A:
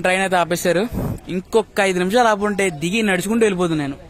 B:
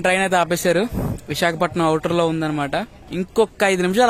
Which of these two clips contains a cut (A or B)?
A